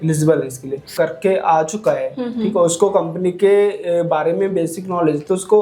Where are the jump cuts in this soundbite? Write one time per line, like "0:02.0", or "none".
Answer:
0:00.9